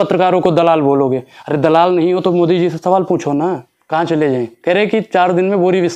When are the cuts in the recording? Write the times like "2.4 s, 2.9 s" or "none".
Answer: 3.7 s